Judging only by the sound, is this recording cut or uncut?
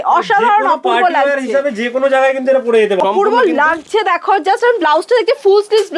cut